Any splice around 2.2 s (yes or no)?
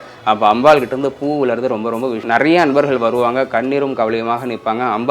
yes